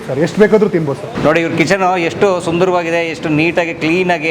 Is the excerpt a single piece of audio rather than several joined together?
no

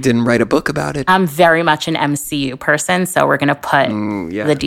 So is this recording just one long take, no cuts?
no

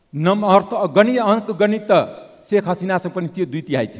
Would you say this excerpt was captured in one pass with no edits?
yes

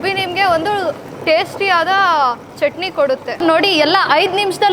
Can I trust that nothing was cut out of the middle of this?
no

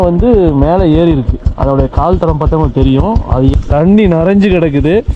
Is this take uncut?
no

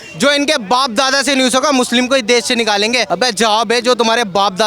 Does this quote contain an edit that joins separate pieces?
yes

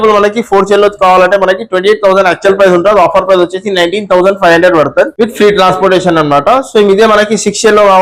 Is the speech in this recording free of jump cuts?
yes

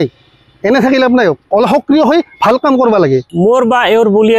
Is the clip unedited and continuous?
no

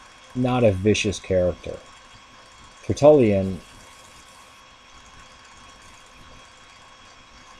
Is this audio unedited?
yes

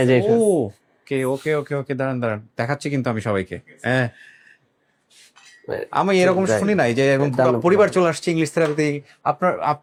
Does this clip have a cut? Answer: no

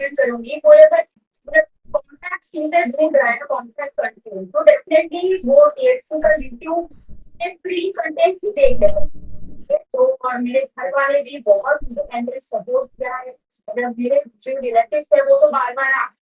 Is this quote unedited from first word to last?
no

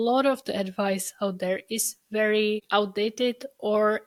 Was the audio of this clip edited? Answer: no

